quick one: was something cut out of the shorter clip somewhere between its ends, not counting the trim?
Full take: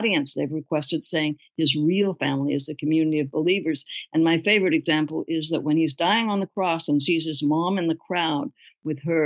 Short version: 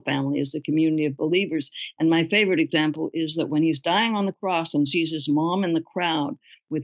no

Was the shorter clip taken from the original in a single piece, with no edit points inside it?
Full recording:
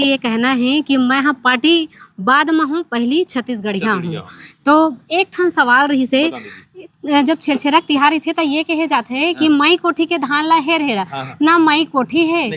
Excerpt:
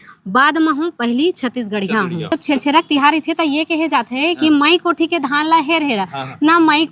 no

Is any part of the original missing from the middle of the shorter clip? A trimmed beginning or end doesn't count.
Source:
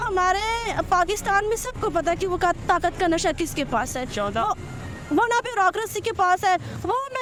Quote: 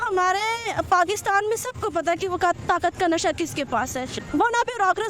yes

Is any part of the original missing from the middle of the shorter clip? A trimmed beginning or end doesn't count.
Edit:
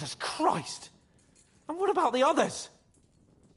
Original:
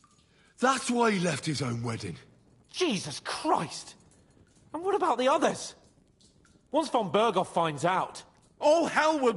no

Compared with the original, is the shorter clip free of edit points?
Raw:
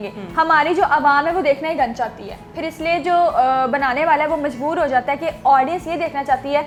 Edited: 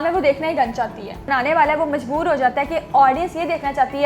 no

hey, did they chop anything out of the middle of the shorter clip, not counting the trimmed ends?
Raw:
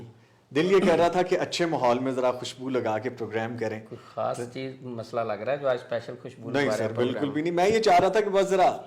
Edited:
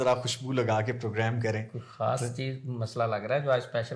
no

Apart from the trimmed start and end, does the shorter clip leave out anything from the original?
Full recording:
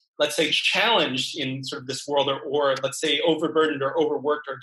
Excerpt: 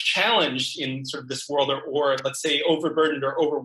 no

